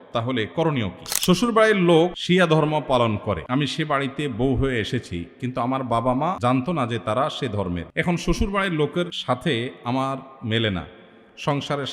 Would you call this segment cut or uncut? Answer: cut